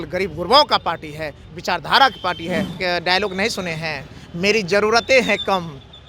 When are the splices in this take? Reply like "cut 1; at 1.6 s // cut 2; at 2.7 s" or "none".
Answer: cut 1; at 2.7 s